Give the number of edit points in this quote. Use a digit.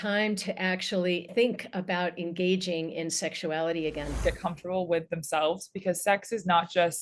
2